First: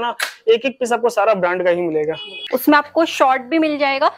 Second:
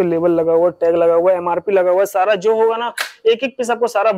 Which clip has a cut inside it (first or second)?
first